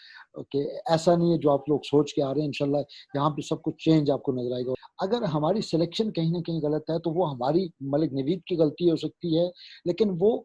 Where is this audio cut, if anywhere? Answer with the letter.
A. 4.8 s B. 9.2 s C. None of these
A